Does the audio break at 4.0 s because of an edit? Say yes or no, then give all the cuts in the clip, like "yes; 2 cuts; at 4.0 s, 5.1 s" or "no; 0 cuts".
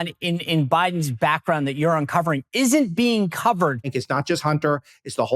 yes; 1 cut; at 4.0 s